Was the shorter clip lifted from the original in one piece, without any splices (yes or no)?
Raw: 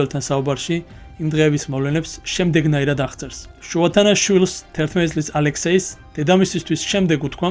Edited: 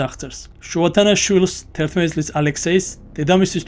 yes